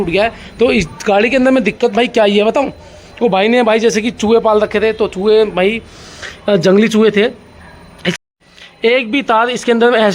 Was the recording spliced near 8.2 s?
yes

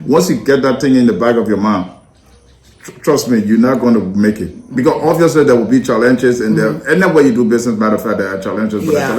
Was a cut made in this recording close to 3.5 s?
no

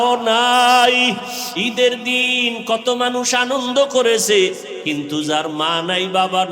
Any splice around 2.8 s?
no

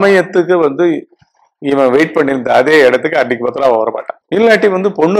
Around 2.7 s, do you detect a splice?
no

